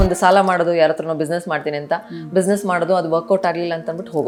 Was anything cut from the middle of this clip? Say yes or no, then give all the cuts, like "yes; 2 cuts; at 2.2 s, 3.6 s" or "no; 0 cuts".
no; 0 cuts